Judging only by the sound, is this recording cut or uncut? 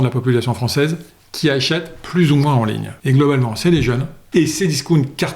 cut